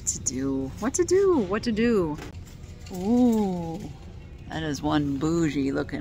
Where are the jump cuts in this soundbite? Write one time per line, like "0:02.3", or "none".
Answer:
0:02.2